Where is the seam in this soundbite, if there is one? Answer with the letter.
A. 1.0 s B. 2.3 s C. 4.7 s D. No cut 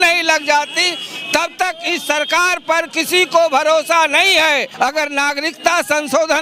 C